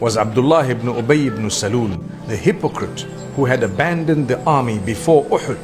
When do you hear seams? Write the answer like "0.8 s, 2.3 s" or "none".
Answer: none